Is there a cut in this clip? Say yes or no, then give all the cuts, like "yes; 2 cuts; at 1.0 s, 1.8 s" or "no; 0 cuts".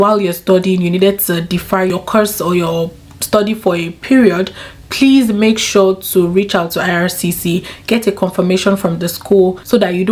no; 0 cuts